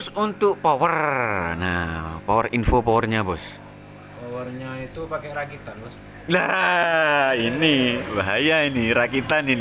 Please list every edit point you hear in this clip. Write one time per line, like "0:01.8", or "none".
none